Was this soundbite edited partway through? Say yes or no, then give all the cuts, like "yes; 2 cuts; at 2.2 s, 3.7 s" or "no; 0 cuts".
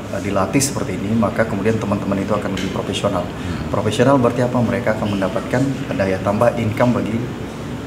no; 0 cuts